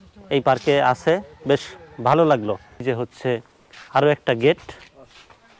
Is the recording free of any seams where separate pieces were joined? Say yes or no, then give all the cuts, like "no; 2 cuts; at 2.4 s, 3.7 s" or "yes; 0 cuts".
no; 1 cut; at 2.8 s